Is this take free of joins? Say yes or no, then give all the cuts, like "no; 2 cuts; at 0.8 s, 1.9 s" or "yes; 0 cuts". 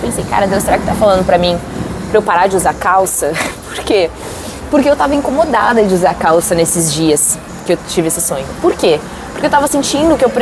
yes; 0 cuts